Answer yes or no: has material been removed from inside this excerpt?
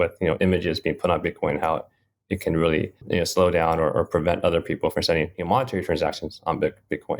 yes